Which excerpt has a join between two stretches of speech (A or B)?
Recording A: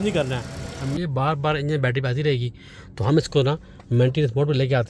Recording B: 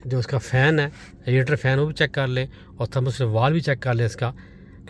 A